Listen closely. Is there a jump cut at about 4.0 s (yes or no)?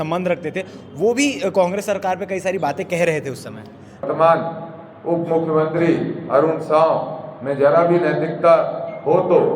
yes